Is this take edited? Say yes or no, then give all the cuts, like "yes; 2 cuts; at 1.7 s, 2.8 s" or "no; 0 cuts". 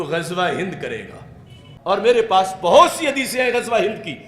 yes; 1 cut; at 2.0 s